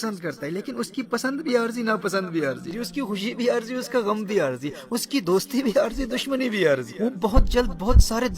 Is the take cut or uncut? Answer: cut